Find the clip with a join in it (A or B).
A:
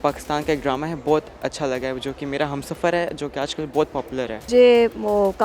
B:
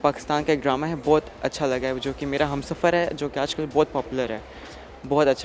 A